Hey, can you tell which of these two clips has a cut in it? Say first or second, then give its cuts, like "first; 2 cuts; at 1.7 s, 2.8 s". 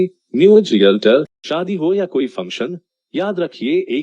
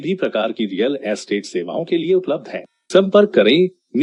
first; 1 cut; at 1.4 s